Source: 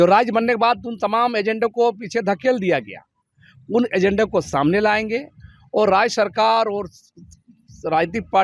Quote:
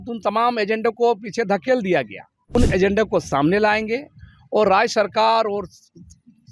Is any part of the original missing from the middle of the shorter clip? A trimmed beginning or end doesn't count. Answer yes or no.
yes